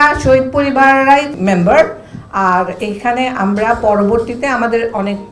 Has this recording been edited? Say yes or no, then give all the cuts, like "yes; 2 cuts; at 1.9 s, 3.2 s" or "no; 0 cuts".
yes; 1 cut; at 1.3 s